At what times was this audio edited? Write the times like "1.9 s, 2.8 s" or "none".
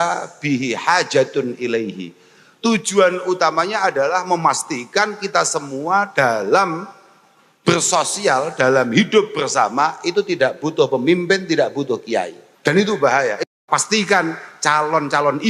12.4 s, 13.5 s